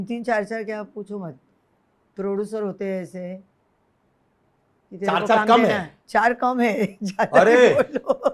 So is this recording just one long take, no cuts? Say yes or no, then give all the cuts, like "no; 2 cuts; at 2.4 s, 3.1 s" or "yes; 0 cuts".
yes; 0 cuts